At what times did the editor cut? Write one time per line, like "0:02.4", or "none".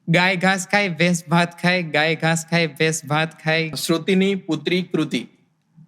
0:03.8